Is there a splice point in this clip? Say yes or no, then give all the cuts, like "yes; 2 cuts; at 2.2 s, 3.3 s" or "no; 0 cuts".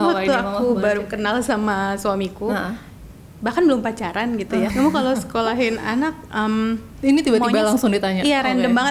yes; 1 cut; at 4.7 s